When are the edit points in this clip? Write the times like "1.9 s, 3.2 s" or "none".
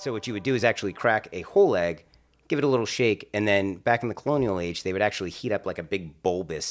none